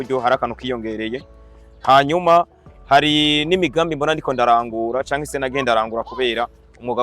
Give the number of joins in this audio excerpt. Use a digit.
0